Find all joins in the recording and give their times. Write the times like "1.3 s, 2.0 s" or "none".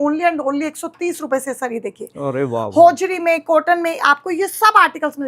none